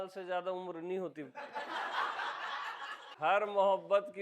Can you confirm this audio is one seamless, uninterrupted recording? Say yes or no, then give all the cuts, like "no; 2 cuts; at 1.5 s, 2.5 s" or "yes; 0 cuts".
no; 1 cut; at 3.0 s